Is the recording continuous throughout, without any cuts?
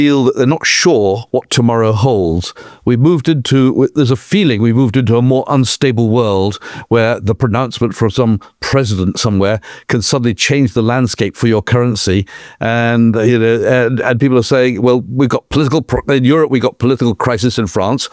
no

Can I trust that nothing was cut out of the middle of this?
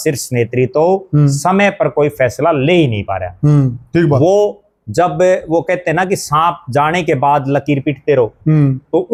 yes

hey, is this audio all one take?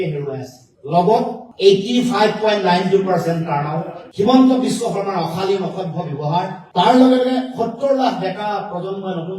yes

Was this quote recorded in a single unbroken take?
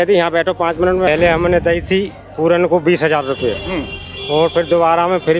no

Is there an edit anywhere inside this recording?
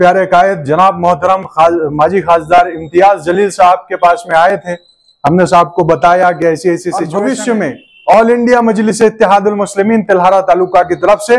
yes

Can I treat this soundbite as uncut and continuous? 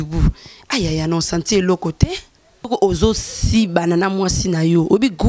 no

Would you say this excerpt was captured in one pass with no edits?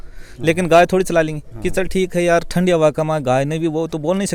yes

